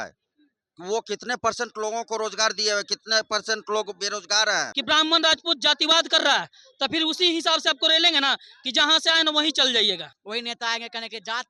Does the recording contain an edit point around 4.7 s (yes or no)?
yes